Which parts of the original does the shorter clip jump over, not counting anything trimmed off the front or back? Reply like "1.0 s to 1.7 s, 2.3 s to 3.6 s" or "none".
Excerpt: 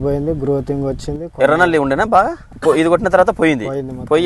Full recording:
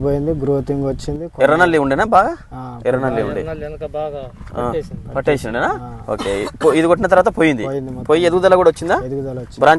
2.5 s to 6.5 s